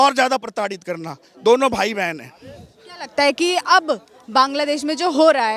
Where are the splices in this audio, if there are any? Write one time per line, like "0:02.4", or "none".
none